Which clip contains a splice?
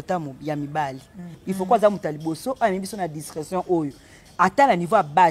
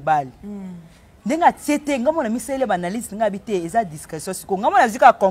first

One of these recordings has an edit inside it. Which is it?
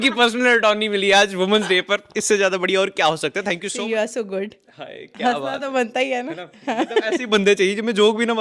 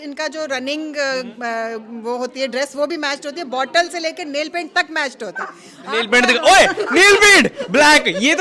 first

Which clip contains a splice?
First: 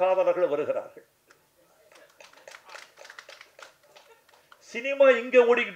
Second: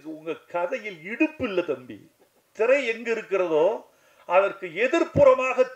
second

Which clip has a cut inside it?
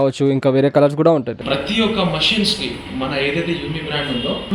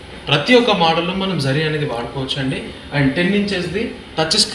first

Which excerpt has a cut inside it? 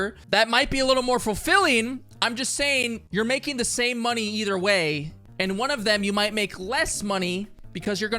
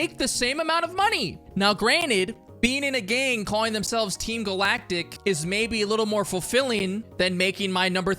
second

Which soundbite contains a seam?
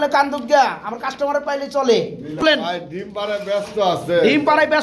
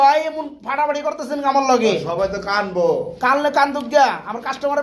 first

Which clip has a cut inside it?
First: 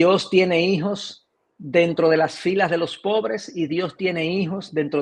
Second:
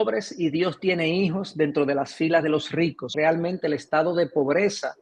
second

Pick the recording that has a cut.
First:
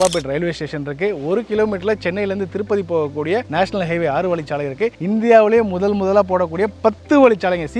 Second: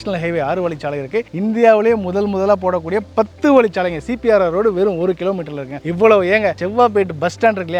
second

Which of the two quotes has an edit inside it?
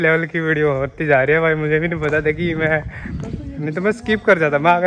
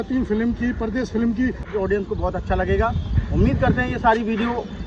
second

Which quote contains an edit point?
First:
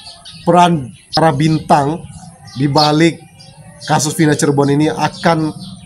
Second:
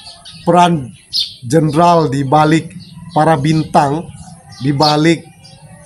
first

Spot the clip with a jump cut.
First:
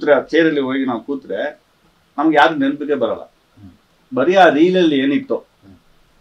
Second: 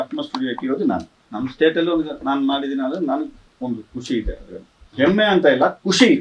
second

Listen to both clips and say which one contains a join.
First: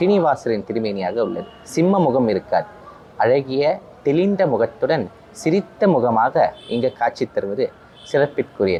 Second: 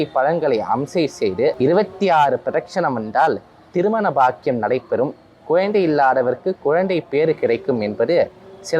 second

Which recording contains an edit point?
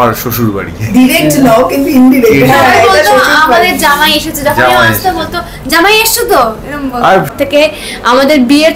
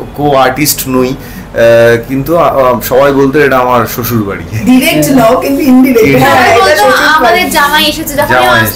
first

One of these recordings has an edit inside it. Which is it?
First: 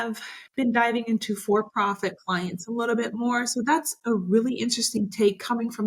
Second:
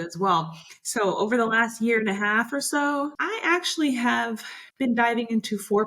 second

